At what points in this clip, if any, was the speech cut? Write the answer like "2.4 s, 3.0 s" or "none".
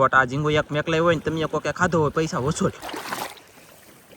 2.9 s